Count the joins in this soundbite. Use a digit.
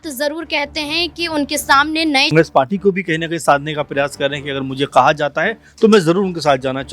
1